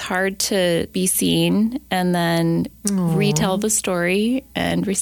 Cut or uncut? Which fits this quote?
cut